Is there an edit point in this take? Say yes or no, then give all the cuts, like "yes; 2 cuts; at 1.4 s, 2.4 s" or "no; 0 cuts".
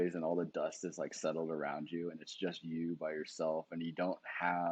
no; 0 cuts